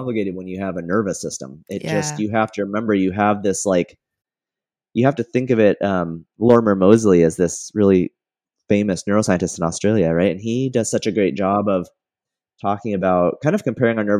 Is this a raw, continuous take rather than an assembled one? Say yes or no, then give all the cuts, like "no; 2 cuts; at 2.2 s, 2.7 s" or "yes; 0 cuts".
yes; 0 cuts